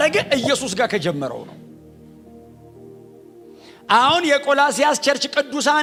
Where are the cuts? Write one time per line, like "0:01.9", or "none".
none